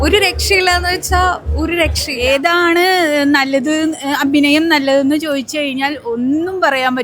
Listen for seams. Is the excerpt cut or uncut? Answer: cut